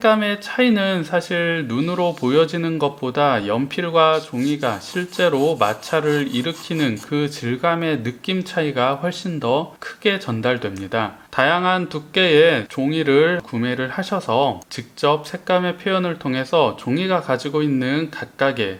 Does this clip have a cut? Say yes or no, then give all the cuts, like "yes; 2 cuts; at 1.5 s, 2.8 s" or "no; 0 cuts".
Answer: no; 0 cuts